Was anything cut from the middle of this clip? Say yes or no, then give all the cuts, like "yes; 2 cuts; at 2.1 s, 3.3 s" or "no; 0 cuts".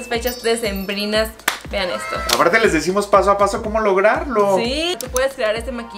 yes; 2 cuts; at 2.2 s, 5.0 s